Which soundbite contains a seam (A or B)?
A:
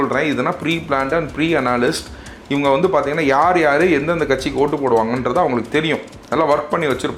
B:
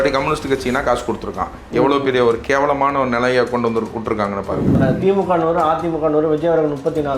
B